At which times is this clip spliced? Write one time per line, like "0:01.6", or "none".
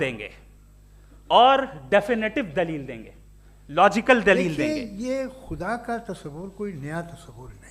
0:04.5

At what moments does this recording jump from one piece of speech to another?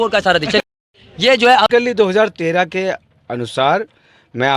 0:01.7

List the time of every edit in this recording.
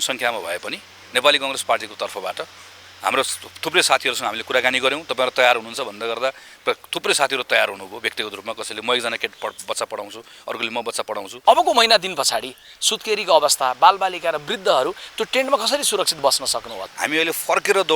0:11.3
0:16.8

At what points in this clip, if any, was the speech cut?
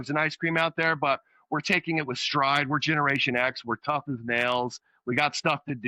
none

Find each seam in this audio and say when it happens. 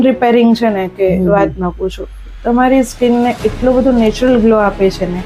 none

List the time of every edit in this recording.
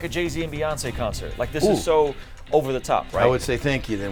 none

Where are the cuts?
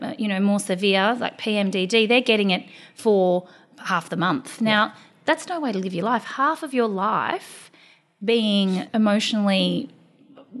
0:08.9

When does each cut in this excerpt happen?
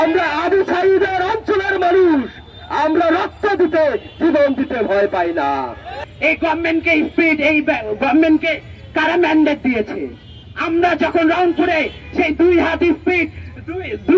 none

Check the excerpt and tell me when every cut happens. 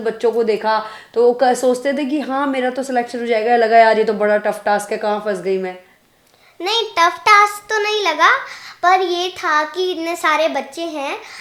none

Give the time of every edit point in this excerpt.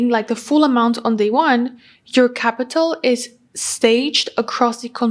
none

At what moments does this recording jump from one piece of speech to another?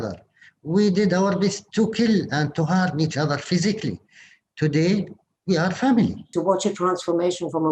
0:06.3

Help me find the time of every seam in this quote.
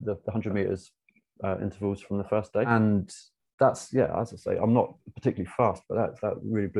0:02.7

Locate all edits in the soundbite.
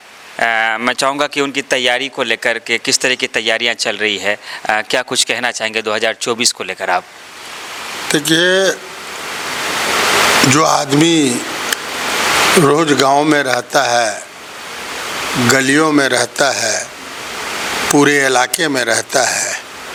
none

